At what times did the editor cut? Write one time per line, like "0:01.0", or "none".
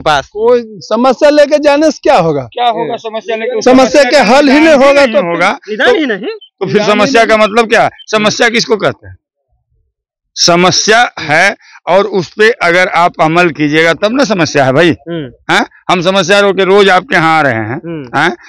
none

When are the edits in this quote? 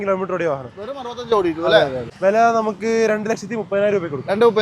0:02.0

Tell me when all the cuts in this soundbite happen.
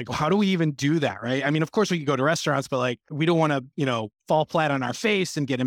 0:03.1
0:04.1

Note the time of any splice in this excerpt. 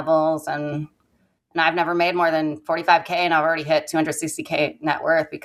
none

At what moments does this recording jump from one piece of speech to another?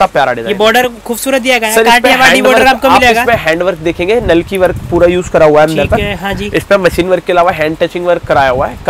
none

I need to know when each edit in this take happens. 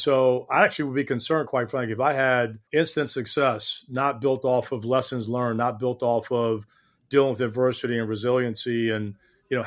0:02.6

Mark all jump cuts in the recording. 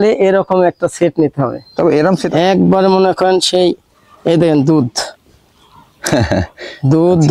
0:01.9

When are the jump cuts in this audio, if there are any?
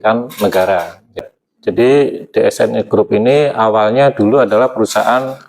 0:01.2

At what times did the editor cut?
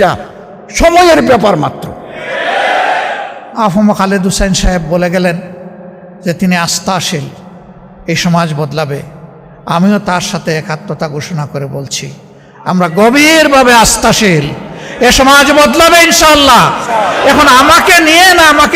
0:03.5

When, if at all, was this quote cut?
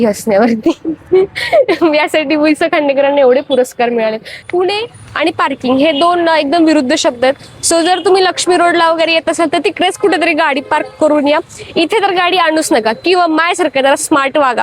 0:04.4

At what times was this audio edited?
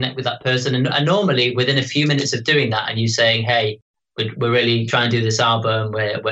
0:04.9

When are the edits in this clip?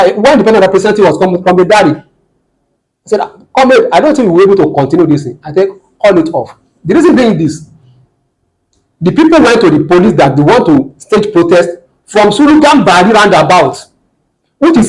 none

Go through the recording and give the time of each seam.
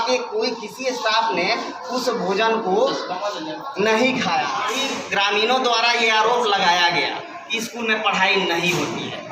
0:04.7

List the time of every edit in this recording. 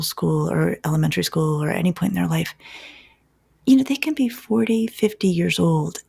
none

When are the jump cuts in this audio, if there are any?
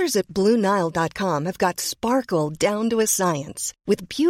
none

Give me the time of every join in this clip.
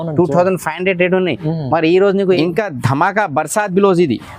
0:02.4

